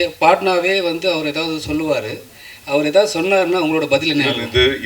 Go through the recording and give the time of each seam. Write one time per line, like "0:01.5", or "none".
none